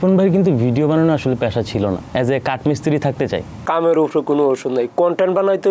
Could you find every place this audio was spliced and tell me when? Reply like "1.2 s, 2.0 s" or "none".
2.0 s, 3.6 s